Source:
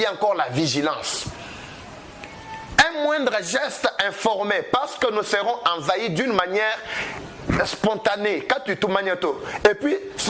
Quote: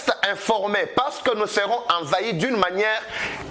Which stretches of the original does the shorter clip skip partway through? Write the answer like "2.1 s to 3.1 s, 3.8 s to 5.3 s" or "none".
none

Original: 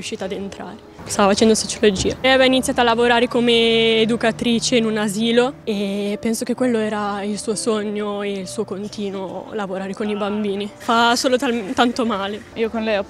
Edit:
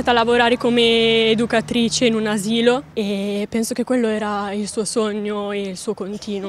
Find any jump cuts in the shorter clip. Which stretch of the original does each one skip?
none

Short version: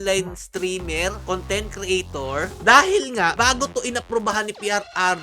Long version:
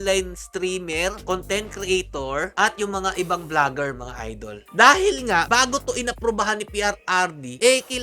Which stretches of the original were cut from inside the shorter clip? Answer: 2.5 s to 4.6 s

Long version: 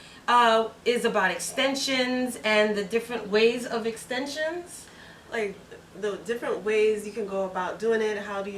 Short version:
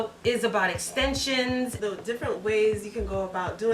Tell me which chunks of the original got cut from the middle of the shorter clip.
2.3 s to 5.9 s

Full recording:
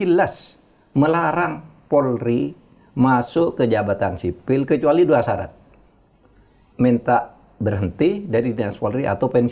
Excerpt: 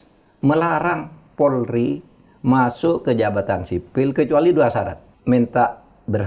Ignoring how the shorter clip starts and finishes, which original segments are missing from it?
5.6 s to 6.6 s

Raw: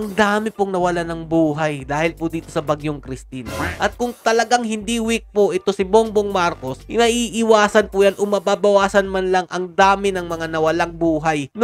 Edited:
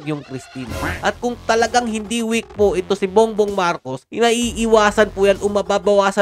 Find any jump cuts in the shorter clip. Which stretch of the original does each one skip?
none

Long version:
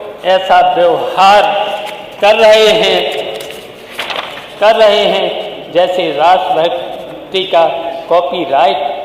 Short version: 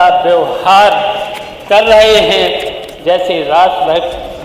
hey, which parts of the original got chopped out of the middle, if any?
3.4 s to 5.5 s

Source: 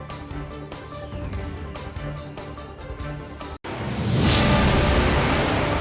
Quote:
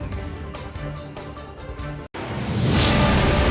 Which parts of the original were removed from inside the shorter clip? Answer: 3.3 s to 3.6 s

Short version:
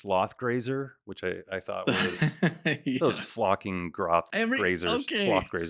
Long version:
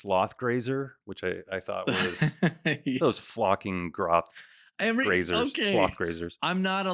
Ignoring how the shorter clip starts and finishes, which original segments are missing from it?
4.3 s to 4.8 s

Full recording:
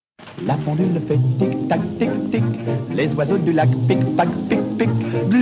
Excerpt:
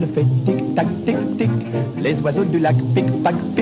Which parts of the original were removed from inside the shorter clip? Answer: none

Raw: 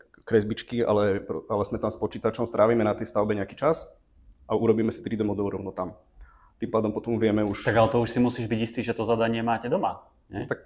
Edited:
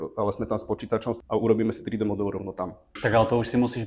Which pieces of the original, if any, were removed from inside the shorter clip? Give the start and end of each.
2.5 s to 4.4 s, 6.1 s to 7.6 s

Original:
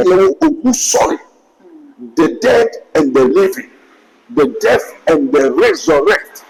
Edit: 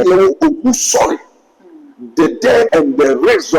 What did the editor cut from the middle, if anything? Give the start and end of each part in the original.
2.7 s to 5.0 s

